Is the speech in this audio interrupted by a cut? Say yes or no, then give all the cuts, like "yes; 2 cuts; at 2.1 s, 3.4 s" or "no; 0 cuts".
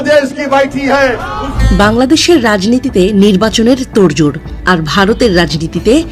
yes; 1 cut; at 1.5 s